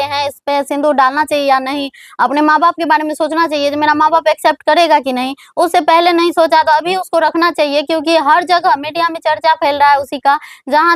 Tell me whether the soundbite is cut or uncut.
uncut